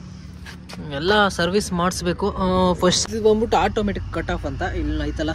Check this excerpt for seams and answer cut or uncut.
cut